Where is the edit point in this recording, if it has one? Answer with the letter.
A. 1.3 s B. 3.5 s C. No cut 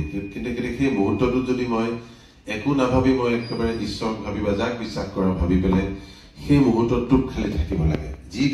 C